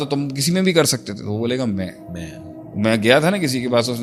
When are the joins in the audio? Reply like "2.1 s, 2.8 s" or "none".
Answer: none

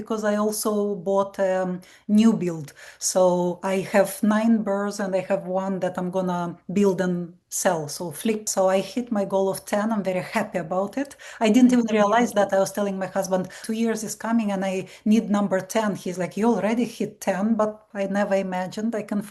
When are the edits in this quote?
8.5 s, 13.6 s, 17.9 s

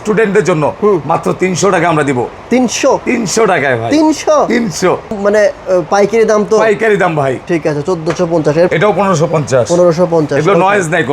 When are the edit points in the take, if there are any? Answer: 5.2 s, 8.7 s

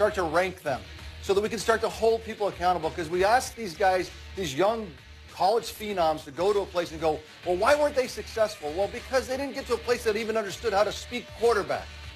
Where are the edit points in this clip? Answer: none

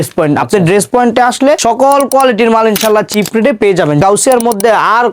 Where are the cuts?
1.6 s, 4.0 s

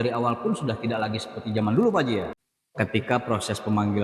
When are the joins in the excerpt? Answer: 2.4 s

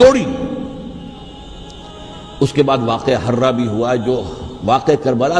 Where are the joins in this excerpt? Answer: 1.3 s

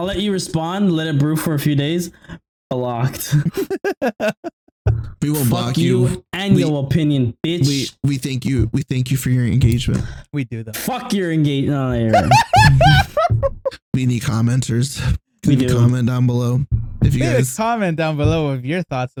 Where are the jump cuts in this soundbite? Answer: none

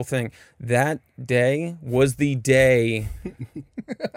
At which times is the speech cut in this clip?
none

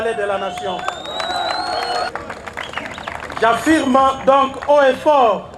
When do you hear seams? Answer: 2.1 s

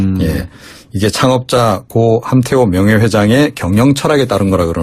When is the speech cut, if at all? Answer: 2.5 s

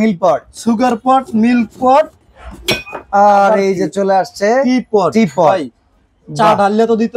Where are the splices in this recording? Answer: none

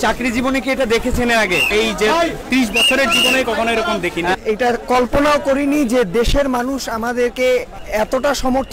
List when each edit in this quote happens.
1.7 s, 4.4 s, 7.8 s

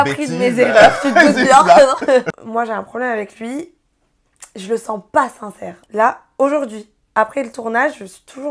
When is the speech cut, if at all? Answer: 2.3 s, 5.8 s

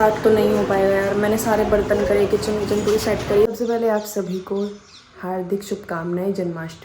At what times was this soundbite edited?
3.5 s

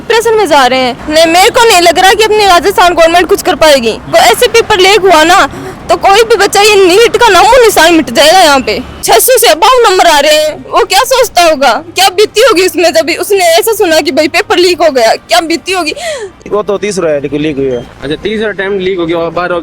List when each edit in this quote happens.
1.0 s, 4.1 s, 9.0 s, 16.4 s

